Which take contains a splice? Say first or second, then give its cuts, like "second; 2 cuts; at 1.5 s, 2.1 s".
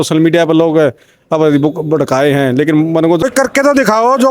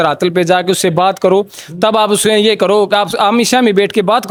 first; 1 cut; at 3.2 s